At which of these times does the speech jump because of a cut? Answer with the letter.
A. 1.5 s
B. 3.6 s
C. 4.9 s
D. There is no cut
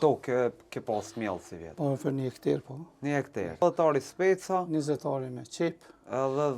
B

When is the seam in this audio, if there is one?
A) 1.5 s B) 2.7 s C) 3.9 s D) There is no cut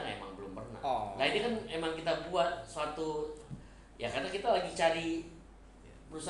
D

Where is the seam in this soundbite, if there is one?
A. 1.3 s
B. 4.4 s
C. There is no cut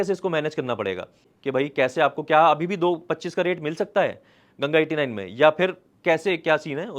A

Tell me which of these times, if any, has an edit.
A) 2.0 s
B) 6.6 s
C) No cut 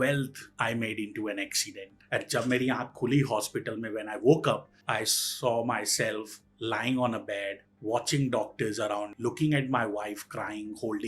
A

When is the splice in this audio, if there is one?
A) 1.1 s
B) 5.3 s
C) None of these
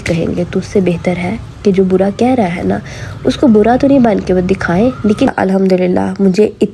B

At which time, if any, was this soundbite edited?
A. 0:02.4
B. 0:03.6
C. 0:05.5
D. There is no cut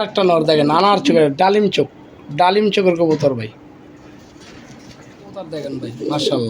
C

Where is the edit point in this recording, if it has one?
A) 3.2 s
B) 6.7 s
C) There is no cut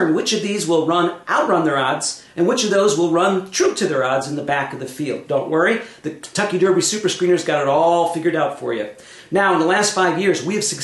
A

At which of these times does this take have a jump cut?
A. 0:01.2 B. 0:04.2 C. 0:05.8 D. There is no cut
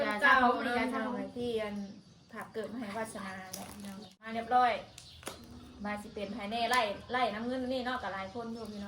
B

